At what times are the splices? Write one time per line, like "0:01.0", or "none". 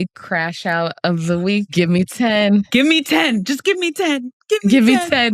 0:00.9
0:02.1

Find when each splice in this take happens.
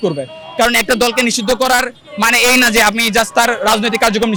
none

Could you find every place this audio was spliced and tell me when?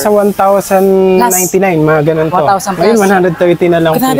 none

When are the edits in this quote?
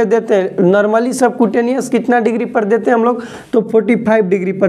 none

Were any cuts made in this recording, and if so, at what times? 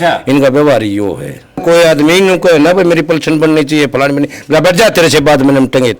0:01.6

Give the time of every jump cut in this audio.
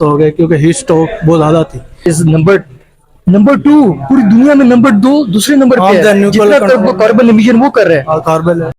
0:02.1

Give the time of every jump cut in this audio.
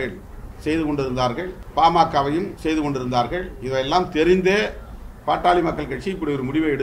0:01.6
0:02.5

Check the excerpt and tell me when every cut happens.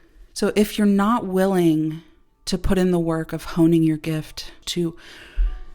0:04.6

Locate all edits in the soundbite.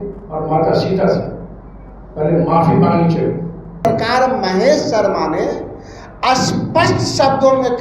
0:03.8

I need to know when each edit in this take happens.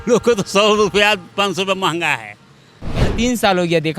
0:03.0

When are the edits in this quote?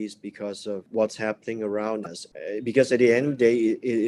0:00.9
0:01.7

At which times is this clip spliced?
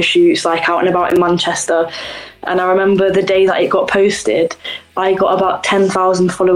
none

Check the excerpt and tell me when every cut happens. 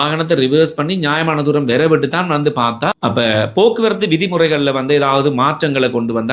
0:03.0

